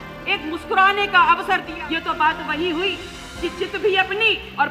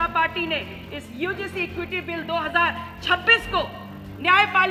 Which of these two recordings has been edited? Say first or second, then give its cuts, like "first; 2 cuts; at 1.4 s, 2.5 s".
first; 1 cut; at 1.7 s